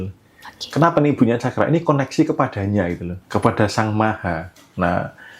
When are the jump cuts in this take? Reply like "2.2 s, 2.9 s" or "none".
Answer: 3.1 s